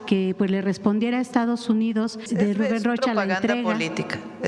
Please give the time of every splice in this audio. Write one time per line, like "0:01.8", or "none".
0:02.3